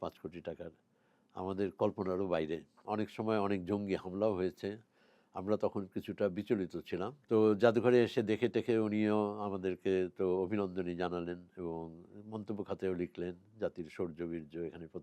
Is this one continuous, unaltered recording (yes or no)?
no